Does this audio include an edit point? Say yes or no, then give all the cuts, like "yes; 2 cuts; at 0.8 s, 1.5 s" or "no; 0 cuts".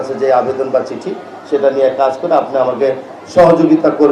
no; 0 cuts